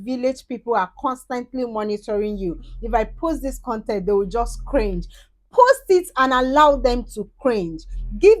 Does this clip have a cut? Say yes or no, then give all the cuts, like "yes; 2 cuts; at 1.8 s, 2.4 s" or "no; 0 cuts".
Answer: no; 0 cuts